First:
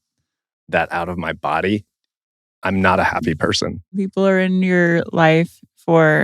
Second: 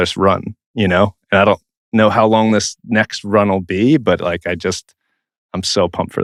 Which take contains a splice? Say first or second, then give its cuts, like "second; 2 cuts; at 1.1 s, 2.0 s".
first; 1 cut; at 3.9 s